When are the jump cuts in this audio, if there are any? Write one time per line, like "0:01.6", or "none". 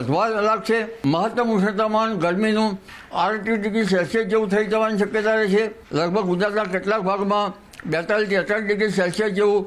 0:00.9
0:05.8